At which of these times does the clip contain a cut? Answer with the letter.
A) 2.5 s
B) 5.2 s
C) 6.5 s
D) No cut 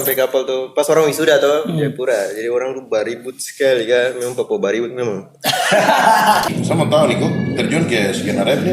C